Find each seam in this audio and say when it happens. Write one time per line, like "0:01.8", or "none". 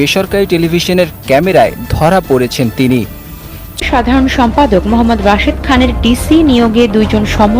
0:03.8

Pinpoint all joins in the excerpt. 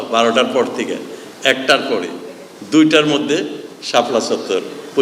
none

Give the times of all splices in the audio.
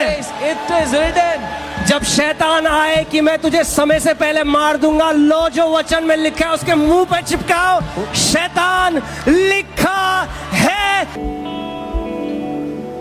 0:11.1

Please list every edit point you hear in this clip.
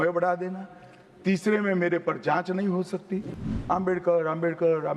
0:03.4

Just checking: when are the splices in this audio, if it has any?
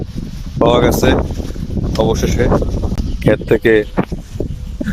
0:02.9

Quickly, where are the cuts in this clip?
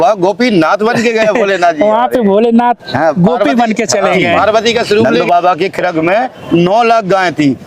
0:05.1

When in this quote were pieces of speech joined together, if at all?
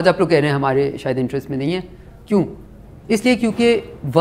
none

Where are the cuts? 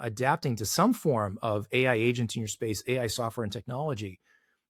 none

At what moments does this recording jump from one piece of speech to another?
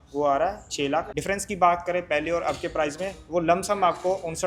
0:01.2

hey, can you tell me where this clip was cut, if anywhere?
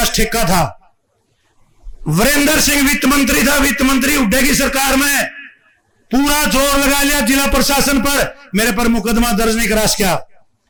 none

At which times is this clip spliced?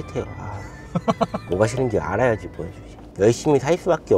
0:01.4
0:03.1

